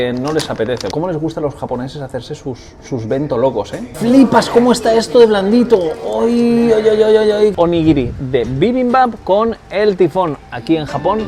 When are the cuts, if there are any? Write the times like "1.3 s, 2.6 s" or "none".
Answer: 0.9 s, 3.9 s, 7.5 s